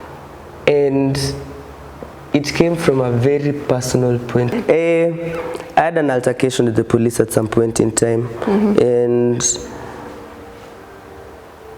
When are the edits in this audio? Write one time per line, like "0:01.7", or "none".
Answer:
0:04.5